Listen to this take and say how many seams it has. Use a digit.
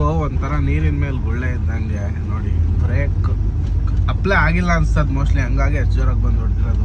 0